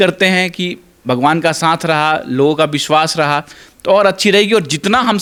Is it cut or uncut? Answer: uncut